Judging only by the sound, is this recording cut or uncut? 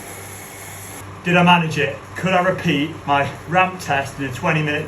cut